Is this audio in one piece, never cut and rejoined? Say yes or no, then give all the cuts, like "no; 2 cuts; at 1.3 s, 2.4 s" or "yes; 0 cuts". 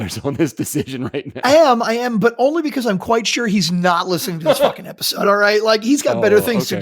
no; 1 cut; at 1.4 s